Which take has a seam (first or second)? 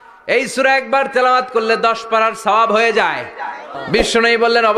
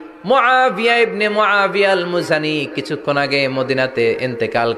first